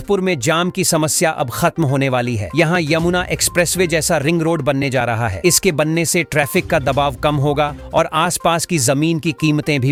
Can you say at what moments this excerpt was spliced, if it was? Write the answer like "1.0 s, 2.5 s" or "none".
none